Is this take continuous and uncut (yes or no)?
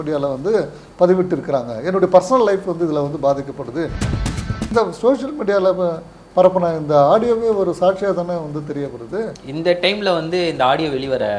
no